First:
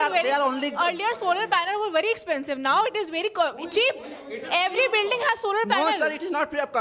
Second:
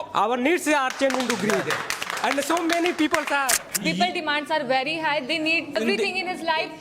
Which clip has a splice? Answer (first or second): second